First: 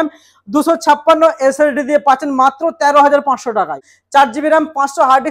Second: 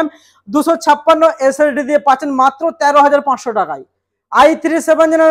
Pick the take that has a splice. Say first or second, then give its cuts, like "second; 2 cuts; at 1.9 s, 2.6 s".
first; 1 cut; at 3.9 s